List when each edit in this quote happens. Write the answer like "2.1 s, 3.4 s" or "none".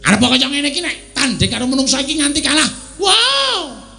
none

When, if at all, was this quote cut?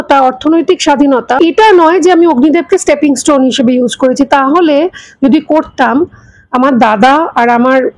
1.4 s

